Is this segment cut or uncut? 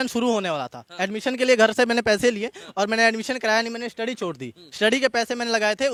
uncut